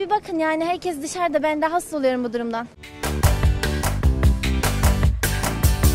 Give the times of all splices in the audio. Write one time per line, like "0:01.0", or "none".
none